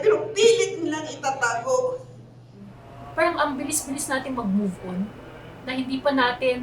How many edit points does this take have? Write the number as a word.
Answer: one